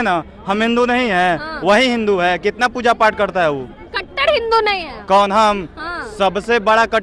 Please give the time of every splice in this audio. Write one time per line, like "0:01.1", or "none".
none